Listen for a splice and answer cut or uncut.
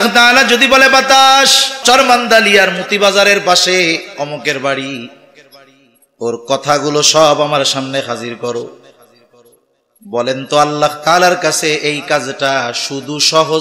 cut